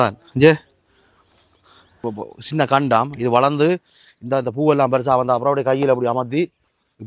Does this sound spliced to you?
yes; 1 cut; at 2.0 s

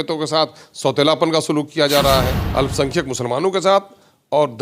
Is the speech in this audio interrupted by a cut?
yes; 1 cut; at 2.4 s

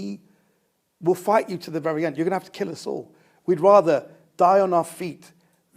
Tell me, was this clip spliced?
no; 0 cuts

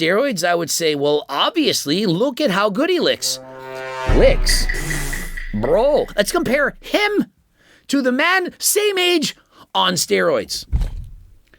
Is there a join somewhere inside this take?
yes; 2 cuts; at 6.1 s, 10.6 s

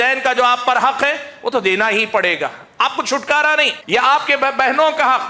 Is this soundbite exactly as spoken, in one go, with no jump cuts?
no; 1 cut; at 3.8 s

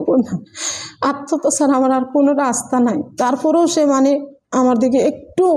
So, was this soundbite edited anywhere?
no; 0 cuts

